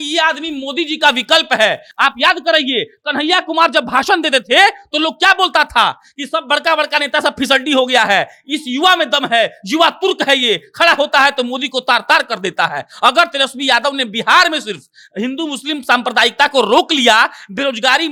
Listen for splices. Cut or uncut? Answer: uncut